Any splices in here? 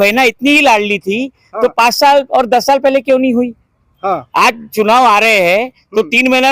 no; 0 cuts

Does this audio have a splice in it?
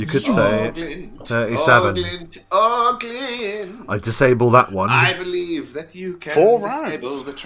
no; 0 cuts

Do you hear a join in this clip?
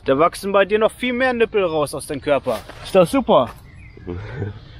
no; 0 cuts

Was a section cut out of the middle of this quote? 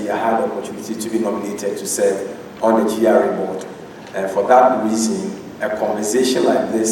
no; 0 cuts

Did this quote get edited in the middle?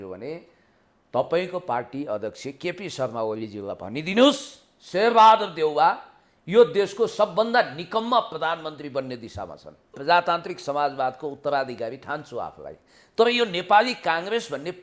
yes; 1 cut; at 10.0 s

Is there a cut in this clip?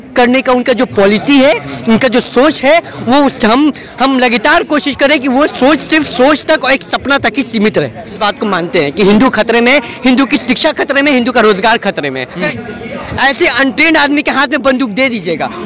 yes; 2 cuts; at 8.2 s, 12.5 s

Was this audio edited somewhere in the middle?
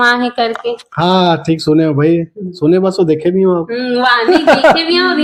no; 0 cuts

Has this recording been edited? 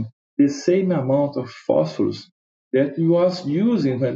no; 0 cuts

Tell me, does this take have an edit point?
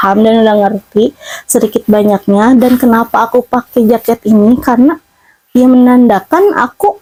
no; 0 cuts

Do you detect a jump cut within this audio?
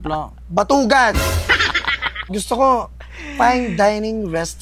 yes; 1 cut; at 2.1 s

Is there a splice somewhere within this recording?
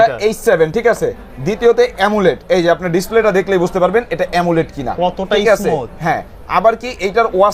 no; 0 cuts

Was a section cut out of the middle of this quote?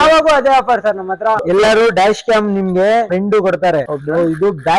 yes; 3 cuts; at 1.4 s, 3.1 s, 3.9 s

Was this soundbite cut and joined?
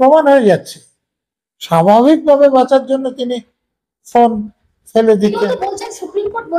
yes; 1 cut; at 5.4 s

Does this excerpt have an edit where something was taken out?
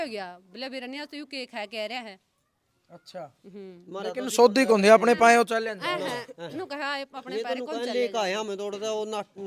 no; 0 cuts

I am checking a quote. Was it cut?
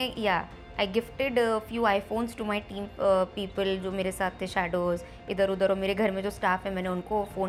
no; 0 cuts

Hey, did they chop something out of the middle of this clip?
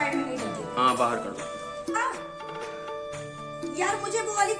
yes; 1 cut; at 1.8 s

